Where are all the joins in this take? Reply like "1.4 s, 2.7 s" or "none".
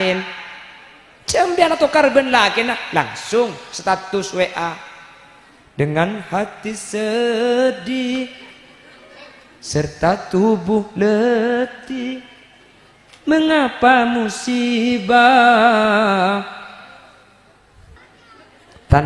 18.0 s